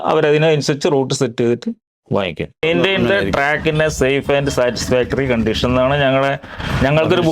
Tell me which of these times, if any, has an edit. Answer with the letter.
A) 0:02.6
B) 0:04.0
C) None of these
A